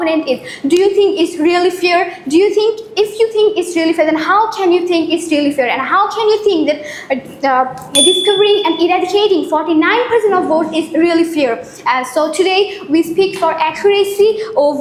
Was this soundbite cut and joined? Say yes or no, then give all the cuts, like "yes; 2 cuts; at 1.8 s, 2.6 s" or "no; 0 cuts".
no; 0 cuts